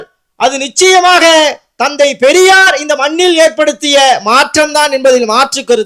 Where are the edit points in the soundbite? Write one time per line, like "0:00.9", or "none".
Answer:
none